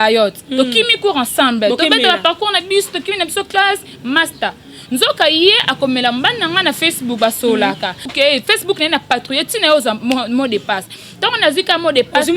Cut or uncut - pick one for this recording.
cut